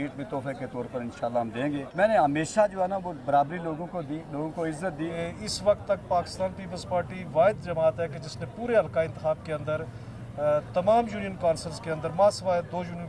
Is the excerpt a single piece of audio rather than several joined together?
no; 2 cuts; at 1.9 s, 5.2 s

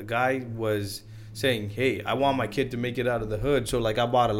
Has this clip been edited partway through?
no; 0 cuts

